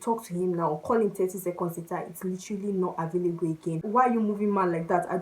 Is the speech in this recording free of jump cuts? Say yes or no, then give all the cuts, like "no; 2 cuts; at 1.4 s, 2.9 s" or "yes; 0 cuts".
no; 1 cut; at 3.8 s